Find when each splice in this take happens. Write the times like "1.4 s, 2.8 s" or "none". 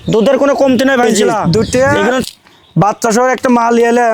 1.1 s